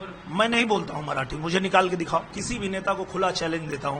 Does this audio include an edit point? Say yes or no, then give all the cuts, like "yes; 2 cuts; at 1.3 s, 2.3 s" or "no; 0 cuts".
yes; 1 cut; at 2.4 s